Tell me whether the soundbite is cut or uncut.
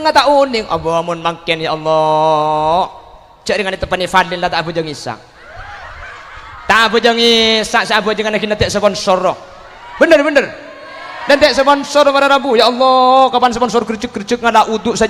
uncut